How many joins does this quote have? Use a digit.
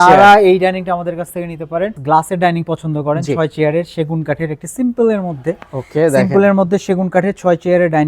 1